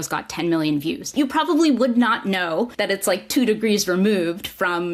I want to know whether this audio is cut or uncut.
cut